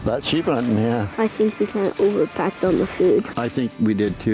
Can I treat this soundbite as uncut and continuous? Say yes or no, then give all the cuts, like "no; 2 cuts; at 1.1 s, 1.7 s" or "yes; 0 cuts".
no; 2 cuts; at 1.1 s, 3.4 s